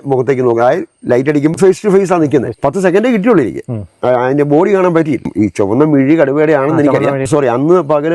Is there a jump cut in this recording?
yes; 4 cuts; at 1.5 s, 2.6 s, 5.3 s, 7.2 s

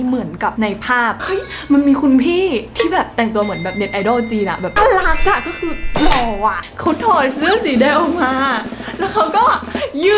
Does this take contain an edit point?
yes; 3 cuts; at 1.2 s, 4.7 s, 6.6 s

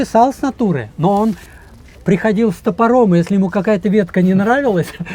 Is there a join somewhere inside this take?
no; 0 cuts

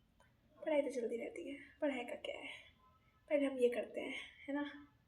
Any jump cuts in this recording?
no; 0 cuts

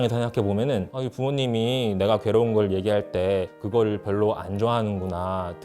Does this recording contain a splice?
yes; 1 cut; at 0.9 s

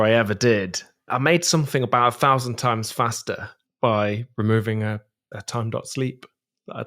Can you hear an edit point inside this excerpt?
yes; 1 cut; at 1.0 s

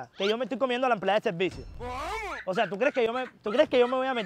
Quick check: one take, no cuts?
yes; 0 cuts

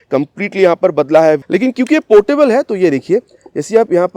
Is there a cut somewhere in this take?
yes; 1 cut; at 1.4 s

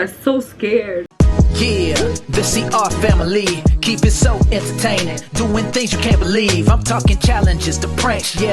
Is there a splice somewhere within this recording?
yes; 1 cut; at 1.0 s

